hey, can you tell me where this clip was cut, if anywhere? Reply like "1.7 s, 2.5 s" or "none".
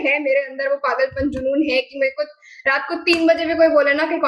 none